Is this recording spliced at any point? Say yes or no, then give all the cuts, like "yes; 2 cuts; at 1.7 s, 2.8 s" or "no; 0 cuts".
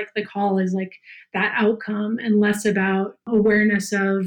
yes; 1 cut; at 3.3 s